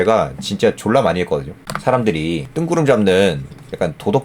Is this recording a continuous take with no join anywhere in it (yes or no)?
no